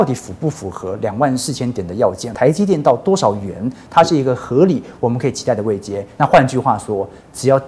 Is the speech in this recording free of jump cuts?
no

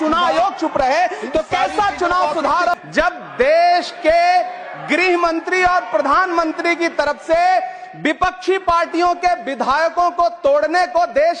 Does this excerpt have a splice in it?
yes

